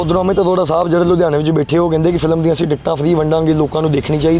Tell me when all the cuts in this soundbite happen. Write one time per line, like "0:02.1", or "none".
none